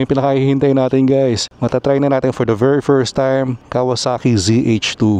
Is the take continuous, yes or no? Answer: no